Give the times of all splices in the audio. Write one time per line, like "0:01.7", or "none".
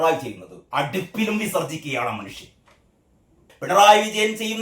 0:03.5